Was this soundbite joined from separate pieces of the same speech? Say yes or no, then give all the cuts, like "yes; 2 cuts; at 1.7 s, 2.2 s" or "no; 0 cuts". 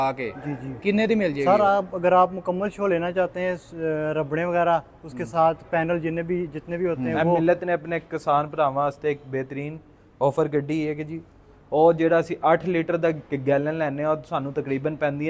yes; 2 cuts; at 1.4 s, 7.4 s